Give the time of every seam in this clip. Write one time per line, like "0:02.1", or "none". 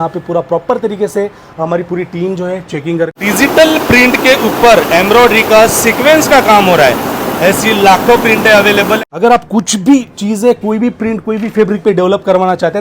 0:03.2
0:09.0